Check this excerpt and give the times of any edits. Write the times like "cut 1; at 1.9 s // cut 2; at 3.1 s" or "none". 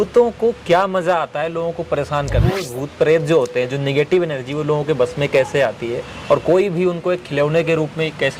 cut 1; at 2.6 s